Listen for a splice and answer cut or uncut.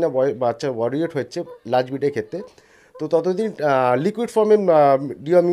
uncut